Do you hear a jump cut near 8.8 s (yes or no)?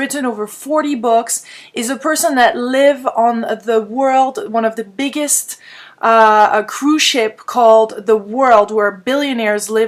yes